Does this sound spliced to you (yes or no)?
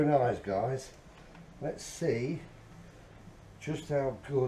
no